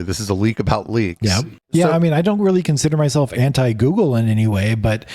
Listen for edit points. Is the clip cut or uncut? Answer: cut